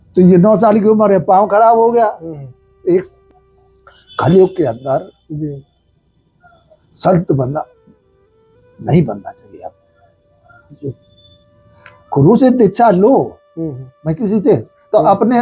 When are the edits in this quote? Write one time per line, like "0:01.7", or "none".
0:03.2